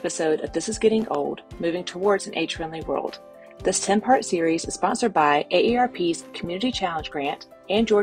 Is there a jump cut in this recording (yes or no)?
no